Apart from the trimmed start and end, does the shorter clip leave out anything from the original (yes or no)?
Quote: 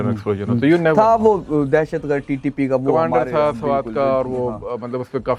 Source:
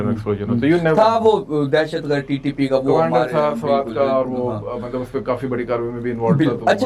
no